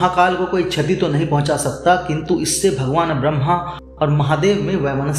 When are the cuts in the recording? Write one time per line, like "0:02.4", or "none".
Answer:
none